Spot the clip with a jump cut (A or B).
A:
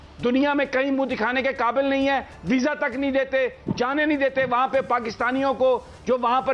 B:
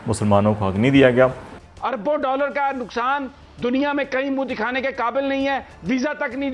B